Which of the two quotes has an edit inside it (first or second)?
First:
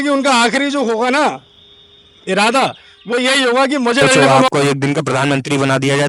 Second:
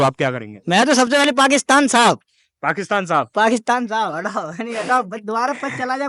first